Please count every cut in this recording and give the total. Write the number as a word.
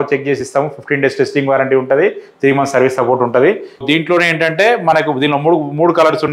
one